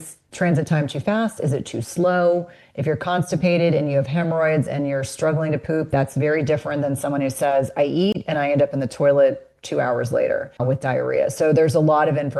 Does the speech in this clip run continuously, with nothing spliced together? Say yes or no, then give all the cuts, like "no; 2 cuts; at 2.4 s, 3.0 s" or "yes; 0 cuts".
no; 1 cut; at 10.5 s